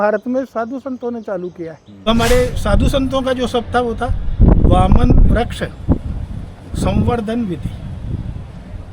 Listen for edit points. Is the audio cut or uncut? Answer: cut